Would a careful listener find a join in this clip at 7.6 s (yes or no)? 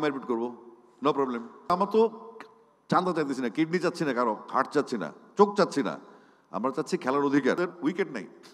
yes